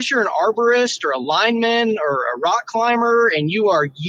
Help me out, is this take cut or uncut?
uncut